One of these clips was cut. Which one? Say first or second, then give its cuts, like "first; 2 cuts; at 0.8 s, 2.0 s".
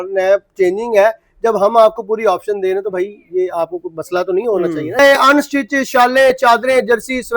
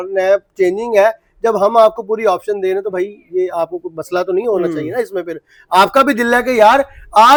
first; 1 cut; at 5.0 s